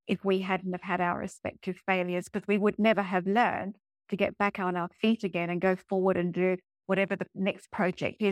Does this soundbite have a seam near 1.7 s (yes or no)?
no